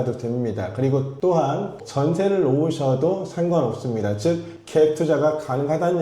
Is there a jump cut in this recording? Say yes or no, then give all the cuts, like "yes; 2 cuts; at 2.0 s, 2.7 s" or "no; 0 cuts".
yes; 1 cut; at 1.7 s